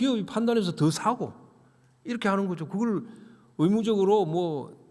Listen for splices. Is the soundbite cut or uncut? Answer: cut